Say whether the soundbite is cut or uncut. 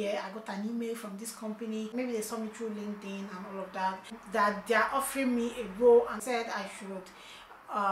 cut